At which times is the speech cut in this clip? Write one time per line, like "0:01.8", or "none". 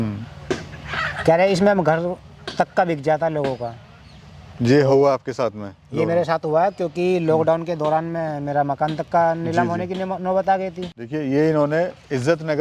0:10.9